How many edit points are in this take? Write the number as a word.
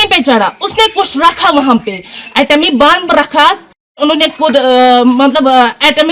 one